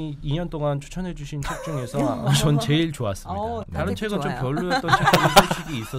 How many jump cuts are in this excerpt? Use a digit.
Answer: 1